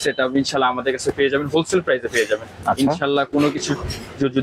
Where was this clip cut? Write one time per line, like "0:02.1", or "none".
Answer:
none